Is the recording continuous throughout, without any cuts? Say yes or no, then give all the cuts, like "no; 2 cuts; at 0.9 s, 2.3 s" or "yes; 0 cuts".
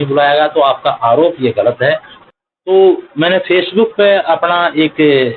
no; 1 cut; at 2.1 s